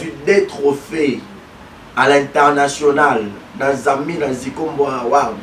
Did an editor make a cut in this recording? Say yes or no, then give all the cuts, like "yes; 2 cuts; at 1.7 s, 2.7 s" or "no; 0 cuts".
no; 0 cuts